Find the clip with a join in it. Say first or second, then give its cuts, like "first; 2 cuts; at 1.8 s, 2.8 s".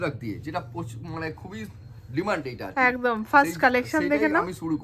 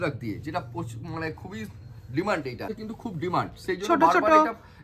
second; 1 cut; at 2.7 s